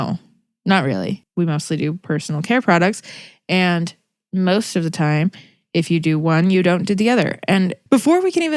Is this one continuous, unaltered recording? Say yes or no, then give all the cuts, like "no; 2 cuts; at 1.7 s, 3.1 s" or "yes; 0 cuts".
no; 1 cut; at 1.2 s